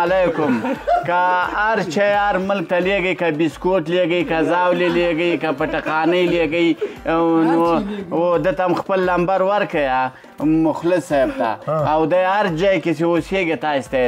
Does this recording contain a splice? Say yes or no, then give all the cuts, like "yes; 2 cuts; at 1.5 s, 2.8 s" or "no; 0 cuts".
no; 0 cuts